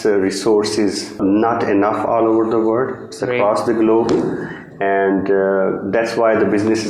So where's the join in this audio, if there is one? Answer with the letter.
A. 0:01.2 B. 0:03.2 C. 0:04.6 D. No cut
A